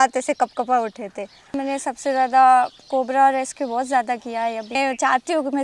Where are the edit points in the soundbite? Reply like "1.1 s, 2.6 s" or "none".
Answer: 1.5 s, 4.8 s